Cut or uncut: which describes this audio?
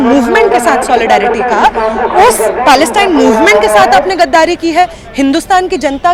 uncut